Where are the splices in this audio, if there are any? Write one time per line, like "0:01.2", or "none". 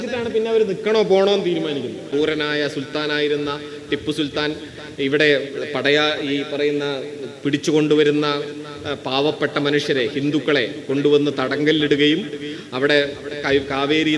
0:02.1